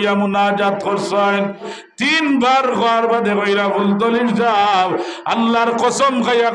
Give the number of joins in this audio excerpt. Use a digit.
1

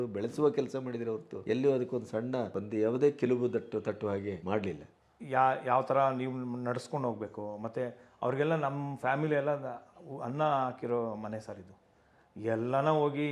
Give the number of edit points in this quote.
3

